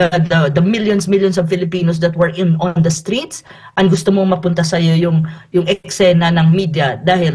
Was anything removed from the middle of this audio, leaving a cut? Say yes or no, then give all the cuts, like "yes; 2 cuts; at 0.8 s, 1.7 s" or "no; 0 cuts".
no; 0 cuts